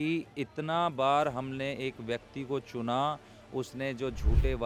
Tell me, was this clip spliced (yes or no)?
no